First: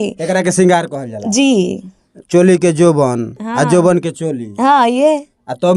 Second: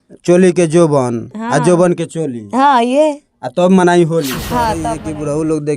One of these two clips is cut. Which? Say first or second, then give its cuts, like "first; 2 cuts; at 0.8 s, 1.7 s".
second; 1 cut; at 4.9 s